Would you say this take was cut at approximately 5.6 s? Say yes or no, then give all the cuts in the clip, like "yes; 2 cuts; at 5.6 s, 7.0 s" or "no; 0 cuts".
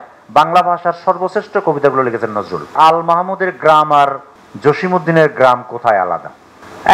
no; 1 cut; at 2.7 s